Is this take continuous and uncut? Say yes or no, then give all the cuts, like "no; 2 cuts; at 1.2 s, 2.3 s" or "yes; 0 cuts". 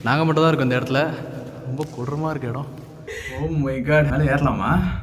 no; 1 cut; at 3.2 s